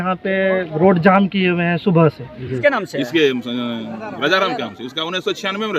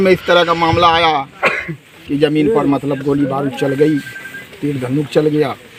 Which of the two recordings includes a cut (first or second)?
first